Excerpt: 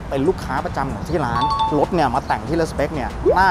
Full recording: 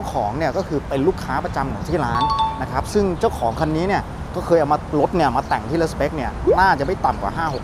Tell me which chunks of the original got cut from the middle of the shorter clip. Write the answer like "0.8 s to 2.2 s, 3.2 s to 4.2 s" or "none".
2.5 s to 4.9 s